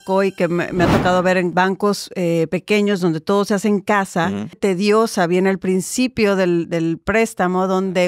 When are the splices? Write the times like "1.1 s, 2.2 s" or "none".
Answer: 1.5 s, 4.6 s